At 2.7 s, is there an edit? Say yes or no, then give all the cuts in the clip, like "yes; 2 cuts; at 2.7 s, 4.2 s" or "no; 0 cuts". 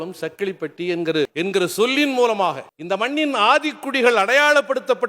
yes; 2 cuts; at 1.3 s, 2.7 s